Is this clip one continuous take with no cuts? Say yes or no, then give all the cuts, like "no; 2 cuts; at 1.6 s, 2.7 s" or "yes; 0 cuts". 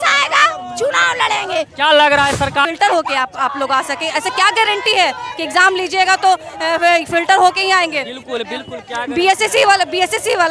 no; 1 cut; at 2.6 s